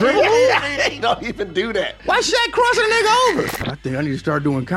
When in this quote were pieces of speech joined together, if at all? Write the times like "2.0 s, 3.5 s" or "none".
3.6 s